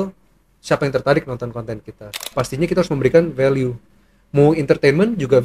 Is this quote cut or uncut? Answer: cut